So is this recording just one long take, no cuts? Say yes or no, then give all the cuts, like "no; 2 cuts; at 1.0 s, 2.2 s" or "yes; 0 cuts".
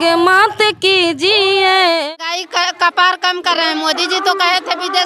no; 1 cut; at 2.1 s